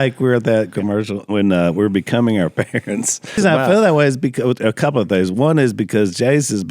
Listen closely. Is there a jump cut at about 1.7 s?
no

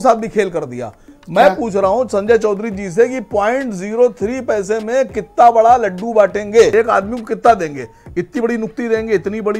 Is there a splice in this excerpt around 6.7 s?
yes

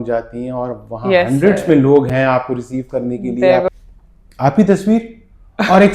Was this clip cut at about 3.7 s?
yes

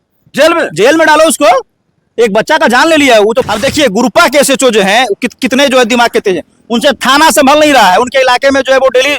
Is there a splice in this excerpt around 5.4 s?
no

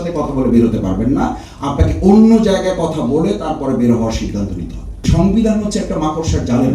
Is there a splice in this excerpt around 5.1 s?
yes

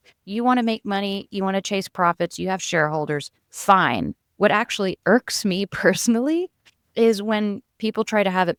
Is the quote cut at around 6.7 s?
no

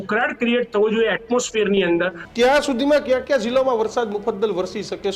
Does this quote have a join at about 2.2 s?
yes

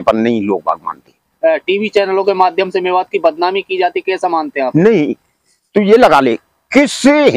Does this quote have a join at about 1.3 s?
yes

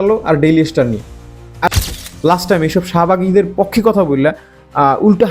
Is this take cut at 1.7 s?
yes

